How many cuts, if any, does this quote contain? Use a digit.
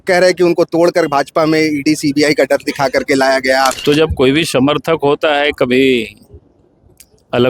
1